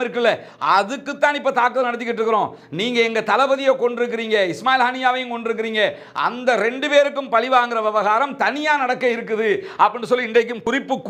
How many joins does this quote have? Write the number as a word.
zero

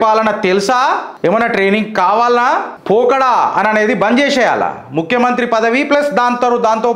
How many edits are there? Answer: two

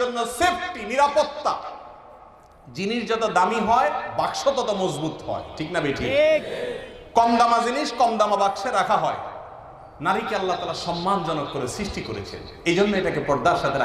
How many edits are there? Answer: zero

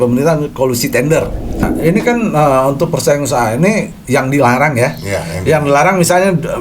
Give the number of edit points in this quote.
one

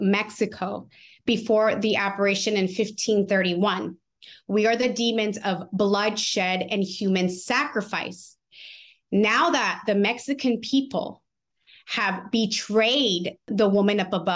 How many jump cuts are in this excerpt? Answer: one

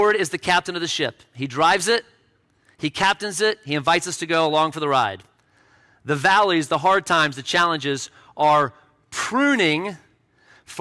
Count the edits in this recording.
zero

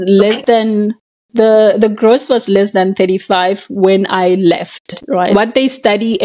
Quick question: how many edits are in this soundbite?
one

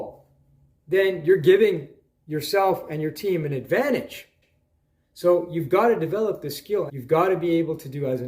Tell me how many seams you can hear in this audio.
one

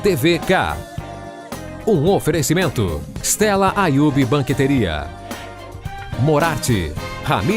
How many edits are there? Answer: one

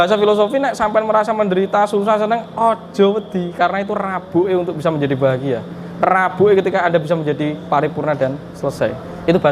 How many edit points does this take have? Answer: zero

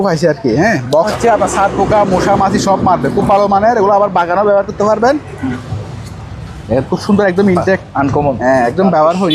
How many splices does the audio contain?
two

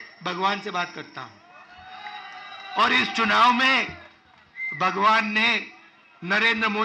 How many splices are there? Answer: zero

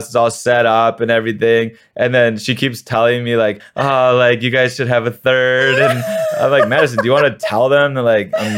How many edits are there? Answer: one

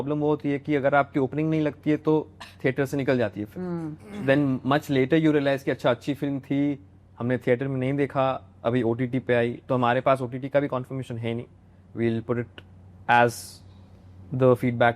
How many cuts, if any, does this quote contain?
zero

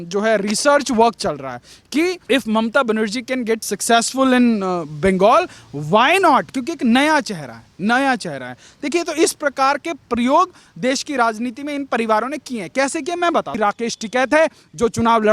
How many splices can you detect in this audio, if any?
one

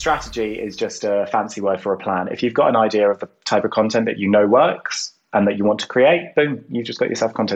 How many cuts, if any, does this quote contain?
zero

